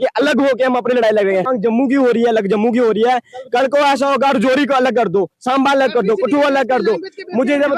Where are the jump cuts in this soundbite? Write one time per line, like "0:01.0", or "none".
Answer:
0:01.5